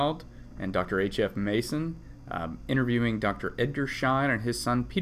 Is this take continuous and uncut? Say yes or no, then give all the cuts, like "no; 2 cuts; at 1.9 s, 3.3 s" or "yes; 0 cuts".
yes; 0 cuts